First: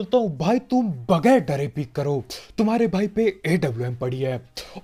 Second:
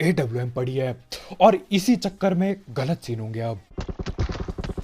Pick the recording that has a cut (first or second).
second